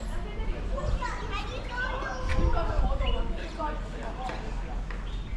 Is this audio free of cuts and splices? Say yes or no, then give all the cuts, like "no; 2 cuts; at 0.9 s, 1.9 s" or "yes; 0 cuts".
yes; 0 cuts